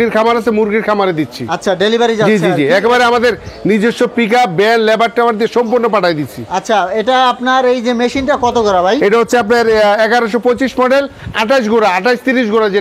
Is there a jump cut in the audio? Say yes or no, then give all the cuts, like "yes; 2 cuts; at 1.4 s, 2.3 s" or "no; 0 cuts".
no; 0 cuts